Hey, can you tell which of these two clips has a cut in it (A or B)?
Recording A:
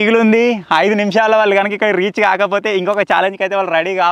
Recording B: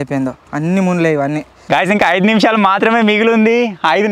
B